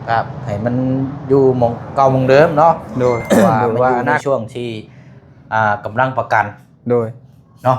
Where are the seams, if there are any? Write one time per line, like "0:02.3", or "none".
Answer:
0:04.2